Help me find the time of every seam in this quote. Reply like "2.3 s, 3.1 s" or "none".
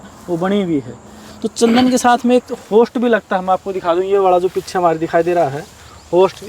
none